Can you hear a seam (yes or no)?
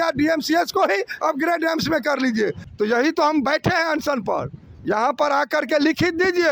yes